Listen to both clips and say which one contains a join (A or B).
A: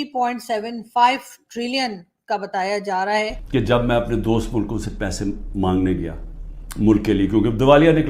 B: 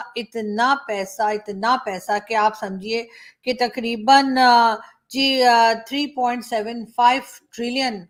A